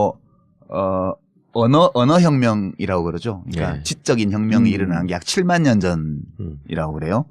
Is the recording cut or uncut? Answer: cut